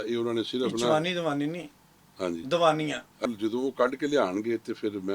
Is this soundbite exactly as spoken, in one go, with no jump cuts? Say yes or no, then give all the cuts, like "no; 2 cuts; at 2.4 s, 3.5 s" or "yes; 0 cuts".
no; 1 cut; at 3.2 s